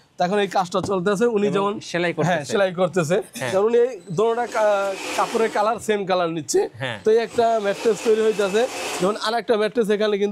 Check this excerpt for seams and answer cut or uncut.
uncut